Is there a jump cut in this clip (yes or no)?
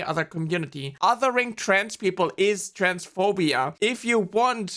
yes